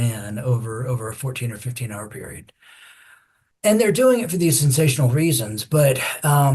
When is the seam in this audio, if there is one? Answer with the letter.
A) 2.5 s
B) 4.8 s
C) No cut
C